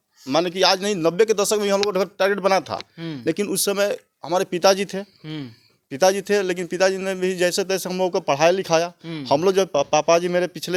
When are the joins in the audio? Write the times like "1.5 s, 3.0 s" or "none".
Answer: none